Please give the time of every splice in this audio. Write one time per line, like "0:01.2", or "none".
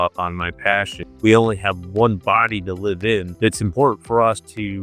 0:01.0
0:03.3